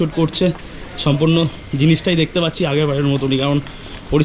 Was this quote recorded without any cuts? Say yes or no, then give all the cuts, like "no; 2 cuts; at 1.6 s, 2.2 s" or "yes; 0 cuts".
yes; 0 cuts